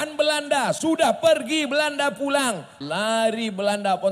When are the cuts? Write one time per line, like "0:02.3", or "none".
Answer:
0:02.7